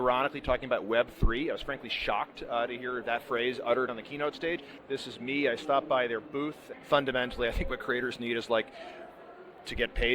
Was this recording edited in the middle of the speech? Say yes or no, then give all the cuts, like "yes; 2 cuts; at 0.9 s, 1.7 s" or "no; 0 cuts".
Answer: yes; 2 cuts; at 4.2 s, 6.7 s